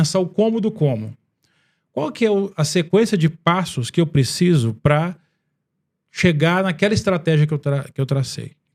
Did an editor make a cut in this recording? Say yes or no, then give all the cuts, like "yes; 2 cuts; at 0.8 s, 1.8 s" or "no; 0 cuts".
no; 0 cuts